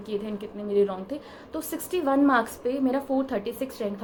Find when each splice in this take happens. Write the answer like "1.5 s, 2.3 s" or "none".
none